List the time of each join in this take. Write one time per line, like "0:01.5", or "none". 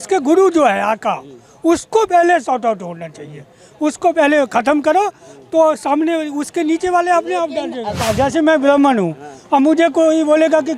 none